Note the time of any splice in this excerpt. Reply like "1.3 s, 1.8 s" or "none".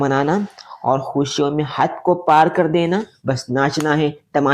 3.1 s